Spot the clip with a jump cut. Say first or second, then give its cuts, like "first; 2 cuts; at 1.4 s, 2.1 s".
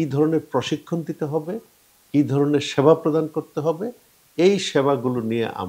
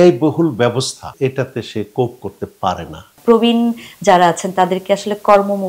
second; 2 cuts; at 1.0 s, 3.2 s